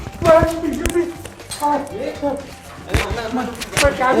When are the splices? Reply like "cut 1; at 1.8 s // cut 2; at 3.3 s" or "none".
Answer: none